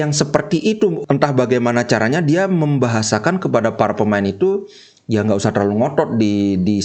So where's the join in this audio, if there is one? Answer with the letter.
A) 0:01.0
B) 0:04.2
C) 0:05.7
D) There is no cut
A